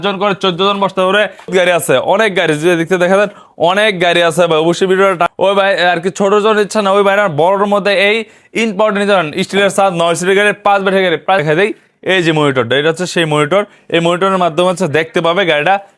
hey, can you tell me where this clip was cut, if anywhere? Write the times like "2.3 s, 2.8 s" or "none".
1.5 s, 5.3 s, 11.4 s